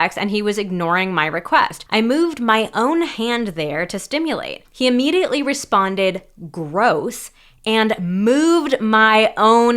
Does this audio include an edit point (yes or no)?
yes